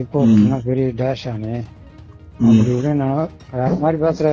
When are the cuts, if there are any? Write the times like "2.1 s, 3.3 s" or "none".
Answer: none